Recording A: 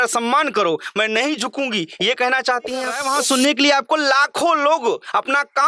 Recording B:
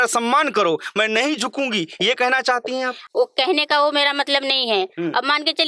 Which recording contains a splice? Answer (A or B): A